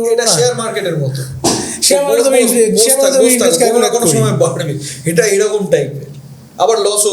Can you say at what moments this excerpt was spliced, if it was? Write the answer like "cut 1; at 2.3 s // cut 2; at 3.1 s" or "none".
none